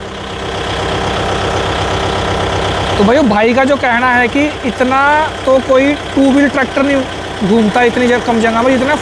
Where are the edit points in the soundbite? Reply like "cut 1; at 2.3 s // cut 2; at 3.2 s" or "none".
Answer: none